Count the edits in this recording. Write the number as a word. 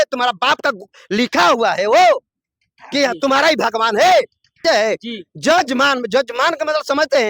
one